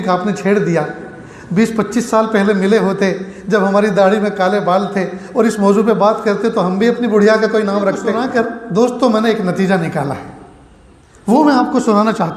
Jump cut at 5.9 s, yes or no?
no